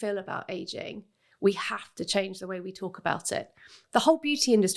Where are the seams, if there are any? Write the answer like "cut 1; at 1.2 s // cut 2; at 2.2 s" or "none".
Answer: cut 1; at 3.8 s